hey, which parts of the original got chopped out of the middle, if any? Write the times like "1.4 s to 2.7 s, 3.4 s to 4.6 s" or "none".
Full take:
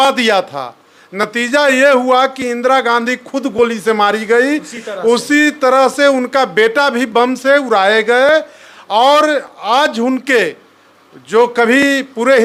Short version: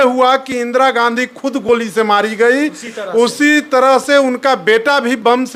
none